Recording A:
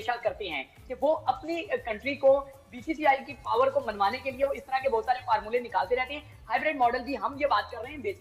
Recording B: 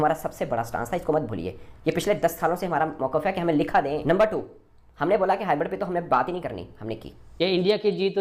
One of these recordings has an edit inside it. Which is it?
B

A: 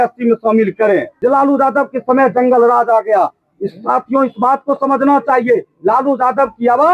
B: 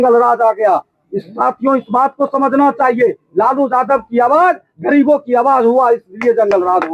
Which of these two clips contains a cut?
A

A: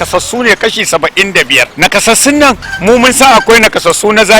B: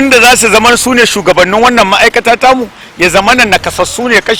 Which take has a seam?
A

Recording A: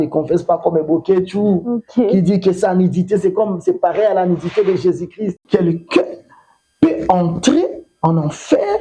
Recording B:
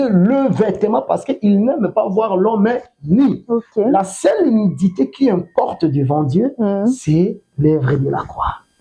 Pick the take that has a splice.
A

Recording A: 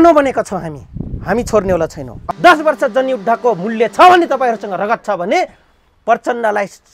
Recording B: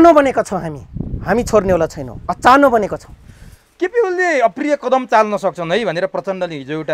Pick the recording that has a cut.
A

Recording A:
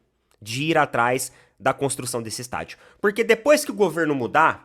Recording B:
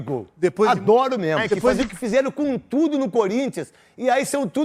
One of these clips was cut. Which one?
B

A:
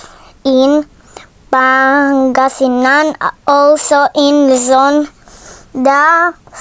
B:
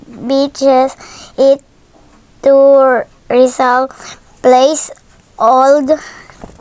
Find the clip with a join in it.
A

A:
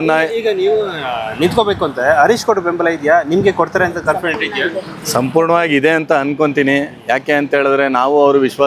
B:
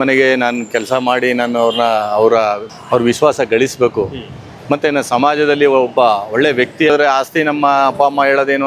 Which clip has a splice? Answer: B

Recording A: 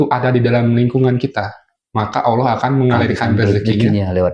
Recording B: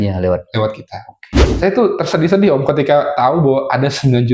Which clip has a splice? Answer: B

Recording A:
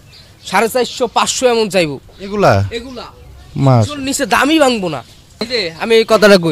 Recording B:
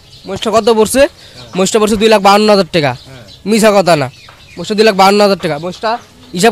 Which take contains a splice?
A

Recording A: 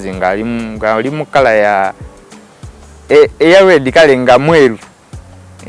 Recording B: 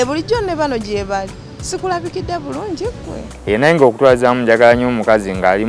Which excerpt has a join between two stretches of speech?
B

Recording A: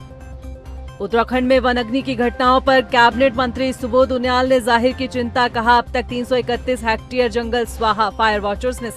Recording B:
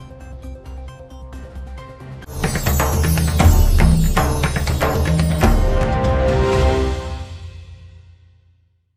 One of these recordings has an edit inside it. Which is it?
A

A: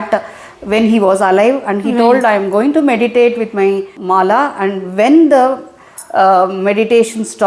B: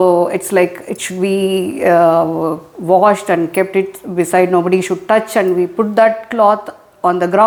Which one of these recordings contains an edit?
A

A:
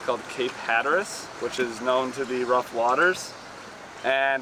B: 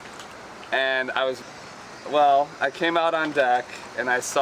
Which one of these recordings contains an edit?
B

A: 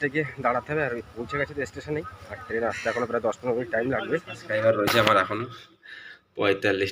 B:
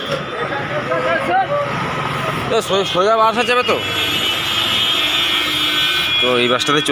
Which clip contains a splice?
A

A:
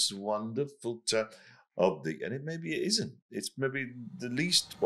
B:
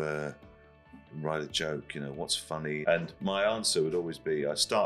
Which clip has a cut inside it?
B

